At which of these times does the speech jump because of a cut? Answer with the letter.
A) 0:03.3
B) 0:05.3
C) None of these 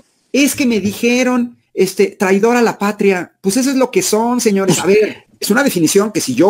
B